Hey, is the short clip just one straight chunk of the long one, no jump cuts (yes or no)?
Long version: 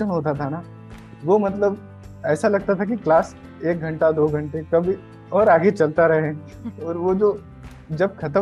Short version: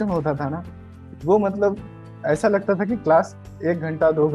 yes